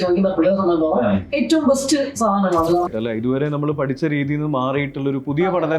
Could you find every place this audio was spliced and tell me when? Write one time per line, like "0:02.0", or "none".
0:02.9